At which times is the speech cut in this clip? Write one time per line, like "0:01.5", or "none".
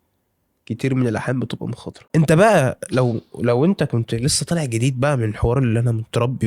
0:01.9